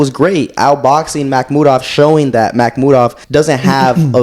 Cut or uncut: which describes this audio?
cut